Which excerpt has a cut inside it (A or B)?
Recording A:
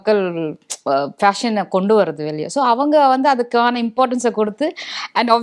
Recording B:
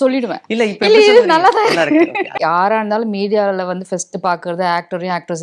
B